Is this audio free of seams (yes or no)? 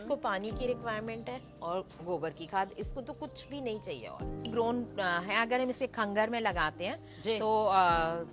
no